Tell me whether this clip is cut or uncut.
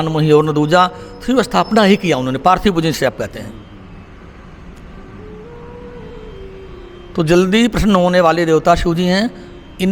uncut